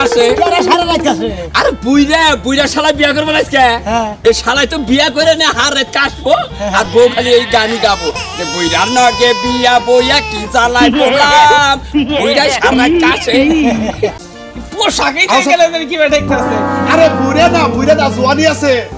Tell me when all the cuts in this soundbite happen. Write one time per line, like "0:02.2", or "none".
0:14.3